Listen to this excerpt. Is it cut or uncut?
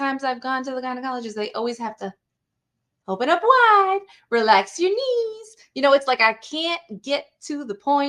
uncut